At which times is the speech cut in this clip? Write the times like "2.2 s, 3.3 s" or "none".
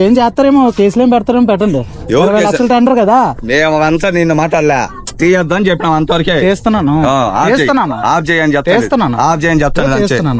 8.1 s